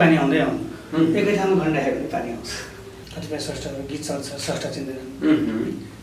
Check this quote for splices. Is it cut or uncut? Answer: cut